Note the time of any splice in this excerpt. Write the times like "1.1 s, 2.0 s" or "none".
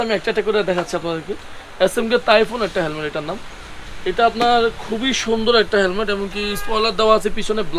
none